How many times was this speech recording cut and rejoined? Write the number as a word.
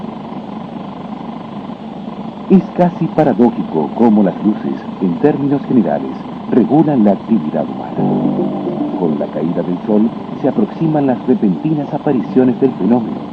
zero